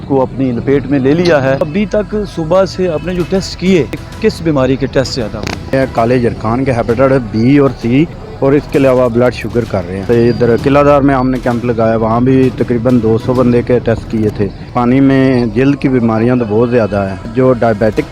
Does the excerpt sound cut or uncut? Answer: cut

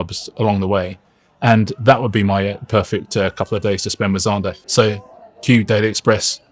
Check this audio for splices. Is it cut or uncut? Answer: cut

